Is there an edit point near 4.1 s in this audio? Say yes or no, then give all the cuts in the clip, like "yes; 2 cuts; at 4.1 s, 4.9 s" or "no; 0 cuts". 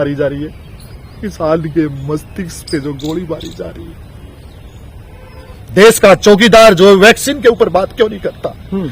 no; 1 cut; at 5.6 s